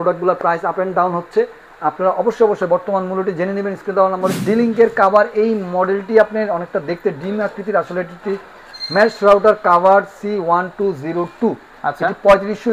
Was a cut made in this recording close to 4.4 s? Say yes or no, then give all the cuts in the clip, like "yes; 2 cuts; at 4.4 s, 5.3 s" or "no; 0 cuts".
yes; 1 cut; at 4.4 s